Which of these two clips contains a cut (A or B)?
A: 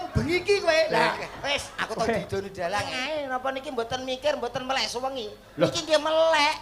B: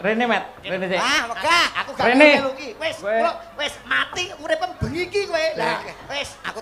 A